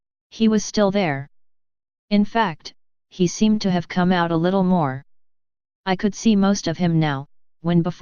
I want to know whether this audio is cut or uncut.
uncut